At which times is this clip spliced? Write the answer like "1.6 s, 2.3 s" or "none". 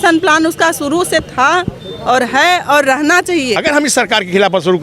3.6 s